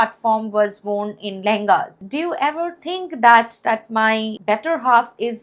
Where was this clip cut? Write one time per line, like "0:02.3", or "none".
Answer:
0:02.0
0:04.3